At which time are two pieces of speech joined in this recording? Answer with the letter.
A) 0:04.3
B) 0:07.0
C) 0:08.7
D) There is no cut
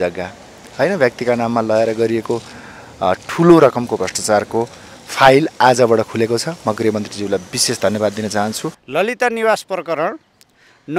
C